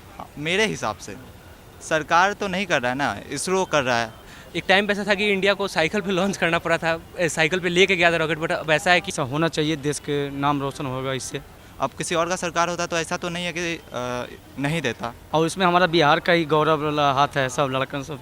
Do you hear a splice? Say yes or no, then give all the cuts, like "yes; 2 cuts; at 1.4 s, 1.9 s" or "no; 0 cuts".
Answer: yes; 4 cuts; at 4.3 s, 9.1 s, 11.6 s, 15.1 s